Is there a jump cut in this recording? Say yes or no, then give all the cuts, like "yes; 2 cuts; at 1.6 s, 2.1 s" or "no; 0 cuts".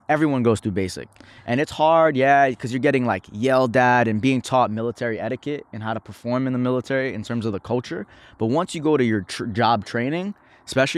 no; 0 cuts